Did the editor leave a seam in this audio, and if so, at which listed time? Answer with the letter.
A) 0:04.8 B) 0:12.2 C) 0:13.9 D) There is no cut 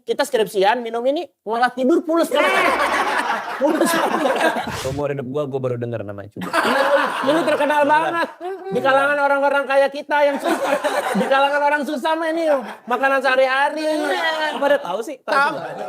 A